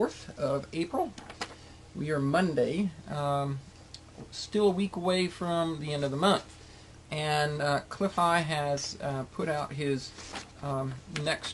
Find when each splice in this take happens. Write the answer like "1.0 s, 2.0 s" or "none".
4.2 s